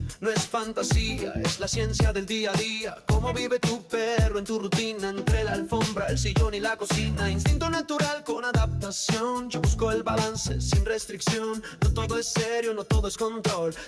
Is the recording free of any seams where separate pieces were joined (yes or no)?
yes